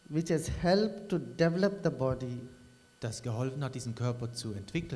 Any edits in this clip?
yes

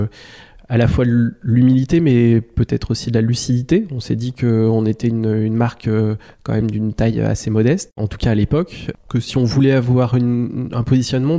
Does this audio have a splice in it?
no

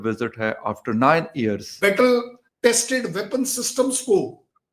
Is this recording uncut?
no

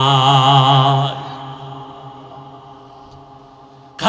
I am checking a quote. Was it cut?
no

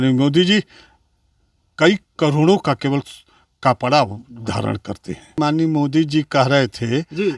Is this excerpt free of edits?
no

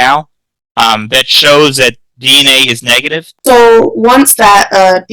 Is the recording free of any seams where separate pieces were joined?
no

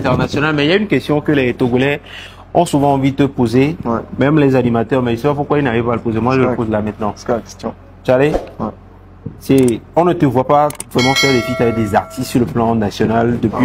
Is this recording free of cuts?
yes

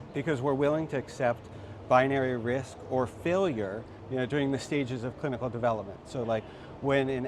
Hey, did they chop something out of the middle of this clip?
no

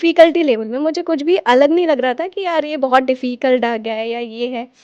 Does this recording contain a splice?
no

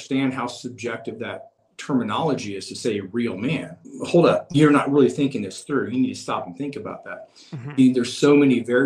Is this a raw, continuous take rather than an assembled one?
no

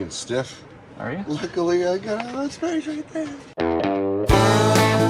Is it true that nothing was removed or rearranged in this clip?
yes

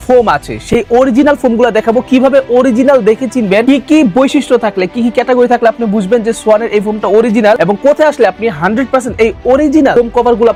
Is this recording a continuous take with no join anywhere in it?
yes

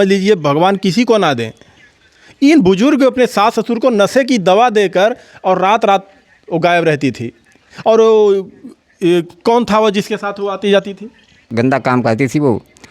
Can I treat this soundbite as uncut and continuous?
no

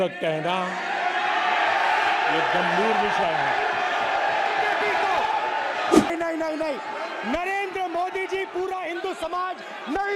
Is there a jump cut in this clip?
yes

